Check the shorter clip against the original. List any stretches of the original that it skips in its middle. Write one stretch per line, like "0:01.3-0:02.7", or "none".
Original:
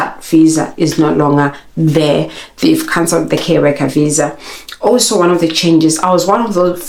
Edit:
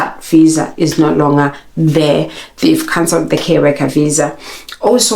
none